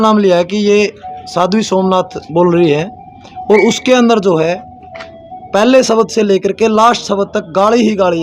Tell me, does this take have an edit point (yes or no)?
no